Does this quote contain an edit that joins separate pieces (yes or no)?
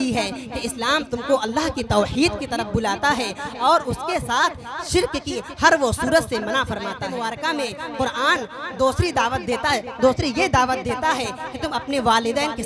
yes